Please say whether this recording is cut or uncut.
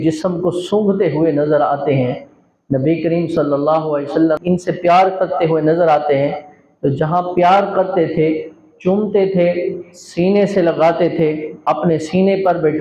cut